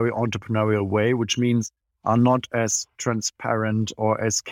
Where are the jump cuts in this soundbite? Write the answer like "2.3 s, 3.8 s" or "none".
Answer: none